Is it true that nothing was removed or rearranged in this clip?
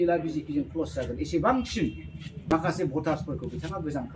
no; 1 cut; at 2.5 s

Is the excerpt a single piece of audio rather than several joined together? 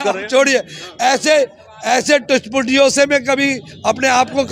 yes; 0 cuts

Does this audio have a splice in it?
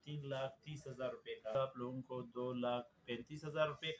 yes; 1 cut; at 1.5 s

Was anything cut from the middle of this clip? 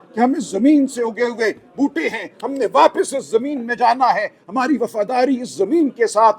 no; 0 cuts

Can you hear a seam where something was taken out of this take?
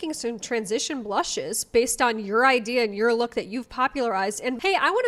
no; 0 cuts

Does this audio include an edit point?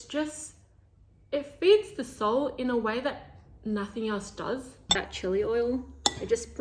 yes; 1 cut; at 4.8 s

